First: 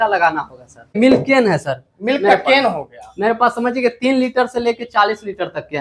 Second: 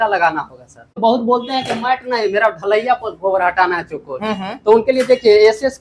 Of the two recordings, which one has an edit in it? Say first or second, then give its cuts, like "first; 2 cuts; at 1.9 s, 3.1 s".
first; 1 cut; at 1.0 s